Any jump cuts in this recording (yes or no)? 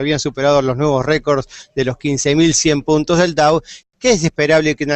yes